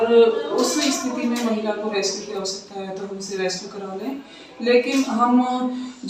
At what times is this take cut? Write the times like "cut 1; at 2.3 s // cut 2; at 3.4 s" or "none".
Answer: none